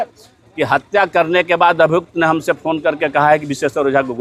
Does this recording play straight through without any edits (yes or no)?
yes